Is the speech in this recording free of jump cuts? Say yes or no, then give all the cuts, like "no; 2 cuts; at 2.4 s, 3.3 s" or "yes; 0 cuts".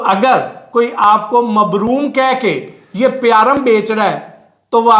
yes; 0 cuts